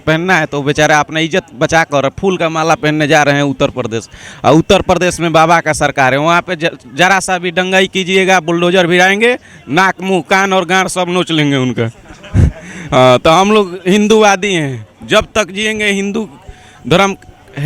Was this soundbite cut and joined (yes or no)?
no